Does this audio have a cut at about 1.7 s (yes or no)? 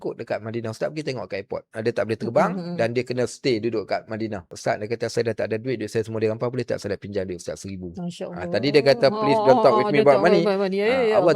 yes